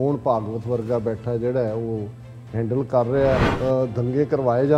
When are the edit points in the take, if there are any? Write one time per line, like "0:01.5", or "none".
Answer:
0:03.5